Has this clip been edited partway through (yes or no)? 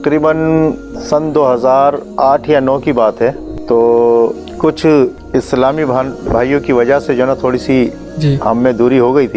yes